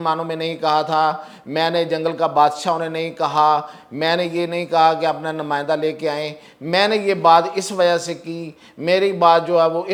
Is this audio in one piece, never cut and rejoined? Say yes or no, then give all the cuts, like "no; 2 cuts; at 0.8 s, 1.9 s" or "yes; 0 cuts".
yes; 0 cuts